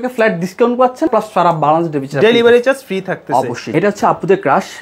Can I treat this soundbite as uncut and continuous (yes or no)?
no